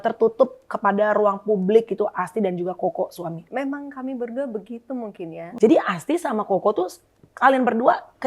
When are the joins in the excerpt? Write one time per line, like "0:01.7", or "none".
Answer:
0:03.5
0:05.4